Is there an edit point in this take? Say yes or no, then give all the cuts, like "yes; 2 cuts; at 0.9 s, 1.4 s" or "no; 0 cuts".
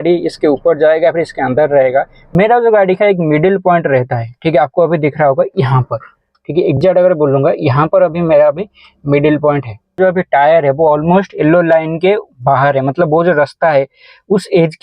yes; 2 cuts; at 2.2 s, 10.0 s